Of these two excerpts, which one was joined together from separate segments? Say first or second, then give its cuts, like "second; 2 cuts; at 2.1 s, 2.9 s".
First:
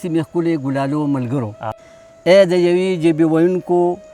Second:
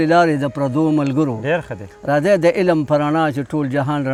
first; 1 cut; at 1.6 s